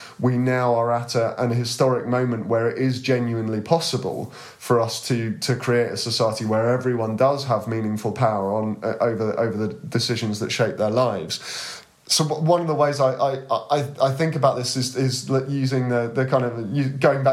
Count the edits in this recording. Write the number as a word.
zero